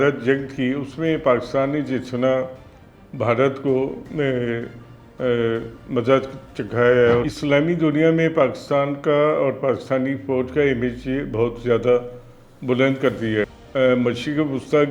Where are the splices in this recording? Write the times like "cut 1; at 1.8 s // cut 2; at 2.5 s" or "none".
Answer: cut 1; at 7.2 s // cut 2; at 13.6 s